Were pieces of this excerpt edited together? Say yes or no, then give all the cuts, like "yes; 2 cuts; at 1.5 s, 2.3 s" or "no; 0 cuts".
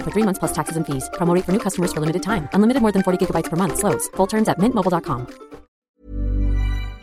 yes; 1 cut; at 5.8 s